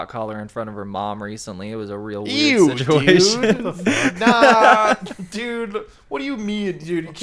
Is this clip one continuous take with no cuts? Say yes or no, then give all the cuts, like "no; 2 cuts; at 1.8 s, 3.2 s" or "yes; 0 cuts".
yes; 0 cuts